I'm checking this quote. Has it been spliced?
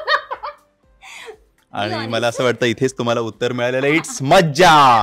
no; 0 cuts

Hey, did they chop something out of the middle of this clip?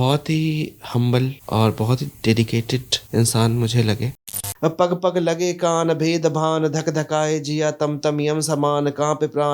yes; 3 cuts; at 1.4 s, 3.0 s, 4.5 s

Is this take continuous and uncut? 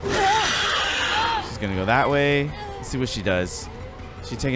yes; 0 cuts

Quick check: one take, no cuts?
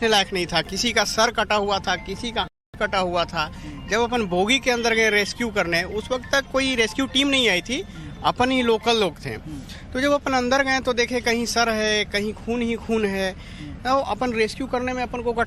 yes; 0 cuts

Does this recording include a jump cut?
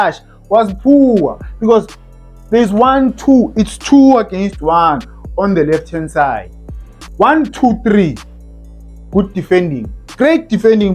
yes; 1 cut; at 7.1 s

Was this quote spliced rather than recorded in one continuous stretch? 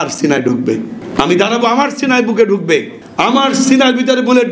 yes; 2 cuts; at 1.0 s, 3.0 s

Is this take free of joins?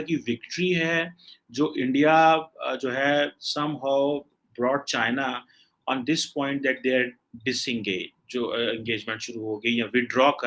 yes; 0 cuts

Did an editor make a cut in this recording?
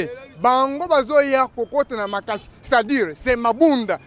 no; 0 cuts

